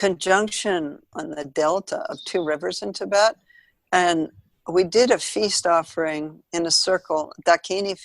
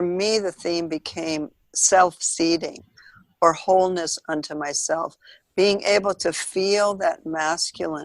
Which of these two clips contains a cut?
first; 1 cut; at 1.1 s

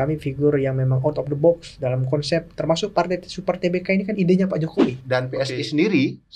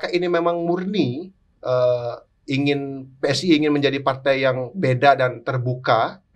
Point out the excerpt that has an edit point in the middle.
first; 1 cut; at 5.0 s

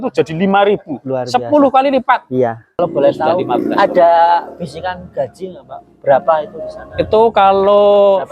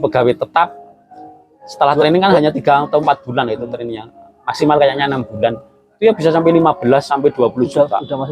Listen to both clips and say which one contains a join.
first; 1 cut; at 2.8 s

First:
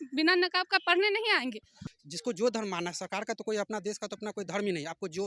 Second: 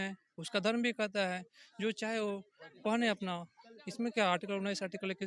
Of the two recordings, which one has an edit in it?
first; 1 cut; at 1.8 s

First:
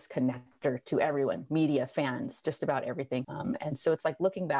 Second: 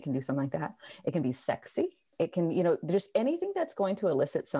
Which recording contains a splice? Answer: first; 1 cut; at 3.3 s

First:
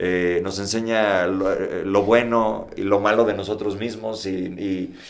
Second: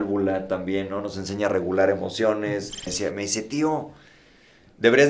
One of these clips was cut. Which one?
second; 1 cut; at 2.8 s

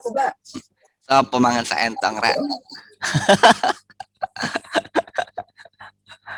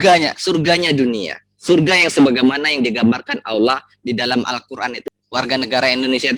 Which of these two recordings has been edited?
second; 1 cut; at 5.0 s

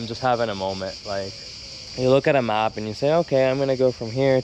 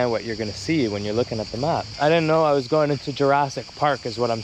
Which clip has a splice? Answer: second; 1 cut; at 1.9 s

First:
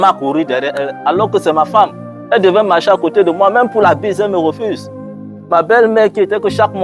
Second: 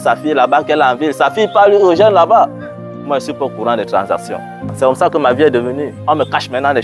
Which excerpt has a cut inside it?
second; 1 cut; at 4.7 s

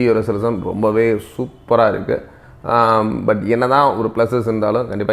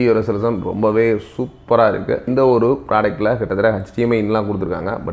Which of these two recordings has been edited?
second; 1 cut; at 2.2 s

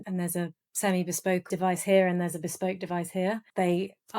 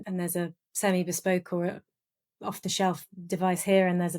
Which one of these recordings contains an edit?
first; 1 cut; at 1.4 s

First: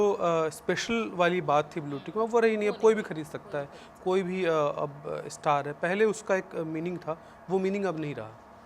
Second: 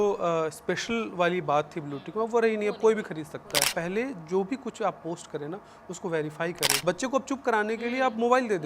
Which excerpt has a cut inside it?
second; 2 cuts; at 3.6 s, 6.7 s

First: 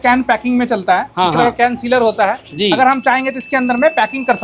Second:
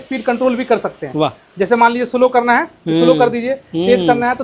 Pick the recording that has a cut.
first; 1 cut; at 2.5 s

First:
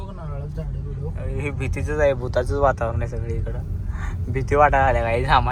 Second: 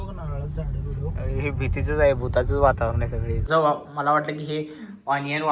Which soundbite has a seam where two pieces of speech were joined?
second; 1 cut; at 3.4 s

